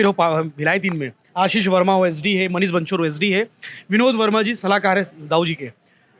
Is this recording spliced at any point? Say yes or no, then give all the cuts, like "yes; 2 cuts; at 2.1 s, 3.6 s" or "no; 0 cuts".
no; 0 cuts